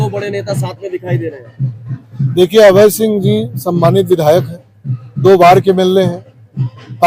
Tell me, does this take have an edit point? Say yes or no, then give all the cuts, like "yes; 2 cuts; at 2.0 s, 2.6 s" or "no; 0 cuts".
no; 0 cuts